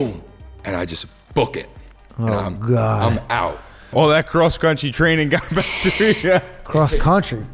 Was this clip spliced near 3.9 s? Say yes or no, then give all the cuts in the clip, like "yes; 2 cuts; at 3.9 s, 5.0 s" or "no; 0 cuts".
yes; 1 cut; at 3.9 s